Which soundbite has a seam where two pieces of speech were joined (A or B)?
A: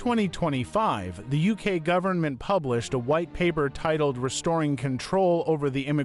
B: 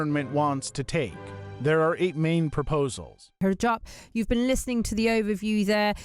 B